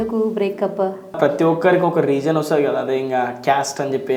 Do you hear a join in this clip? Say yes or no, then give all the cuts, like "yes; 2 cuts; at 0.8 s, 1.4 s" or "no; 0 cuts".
yes; 1 cut; at 1.2 s